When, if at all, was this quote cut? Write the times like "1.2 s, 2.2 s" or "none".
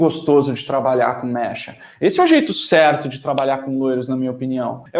none